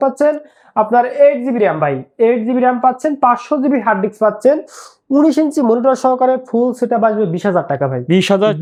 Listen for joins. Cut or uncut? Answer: uncut